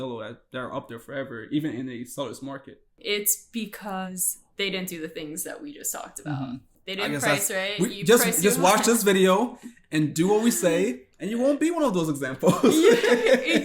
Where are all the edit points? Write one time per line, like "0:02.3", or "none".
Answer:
0:03.0
0:04.1
0:06.7